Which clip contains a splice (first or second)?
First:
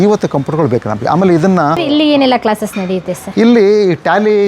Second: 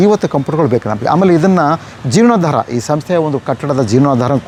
first